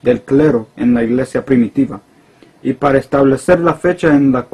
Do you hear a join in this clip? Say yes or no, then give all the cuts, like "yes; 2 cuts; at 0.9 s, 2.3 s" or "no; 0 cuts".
yes; 1 cut; at 1.2 s